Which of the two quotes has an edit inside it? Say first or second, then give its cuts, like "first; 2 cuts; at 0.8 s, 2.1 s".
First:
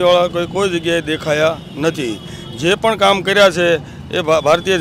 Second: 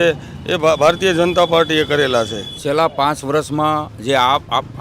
second; 1 cut; at 2.6 s